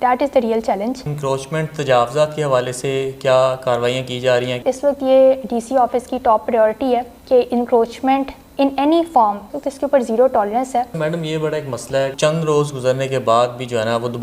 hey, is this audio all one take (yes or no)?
no